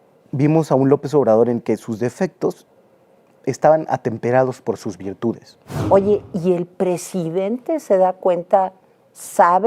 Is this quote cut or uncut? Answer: cut